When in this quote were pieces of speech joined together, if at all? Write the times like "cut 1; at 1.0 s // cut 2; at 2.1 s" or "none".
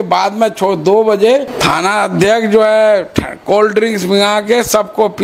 cut 1; at 1.5 s